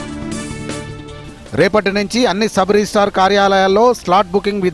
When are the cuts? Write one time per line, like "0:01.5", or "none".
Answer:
0:00.9